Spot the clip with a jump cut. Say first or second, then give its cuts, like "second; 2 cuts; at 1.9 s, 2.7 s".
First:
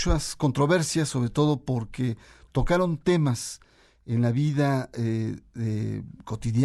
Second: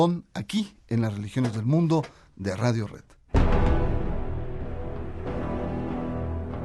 first; 1 cut; at 2.0 s